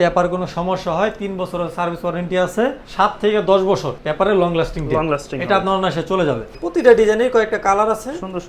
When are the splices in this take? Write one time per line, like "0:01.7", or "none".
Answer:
0:02.8
0:04.0
0:06.5